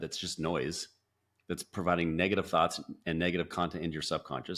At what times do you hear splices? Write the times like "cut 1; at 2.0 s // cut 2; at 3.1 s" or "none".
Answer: none